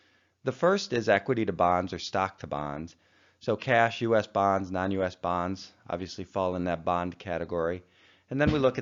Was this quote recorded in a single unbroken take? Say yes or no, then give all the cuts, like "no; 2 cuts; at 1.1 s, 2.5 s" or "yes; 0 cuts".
yes; 0 cuts